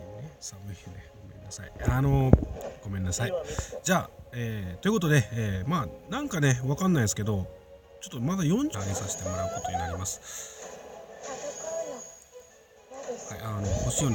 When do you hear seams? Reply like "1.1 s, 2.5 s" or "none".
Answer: none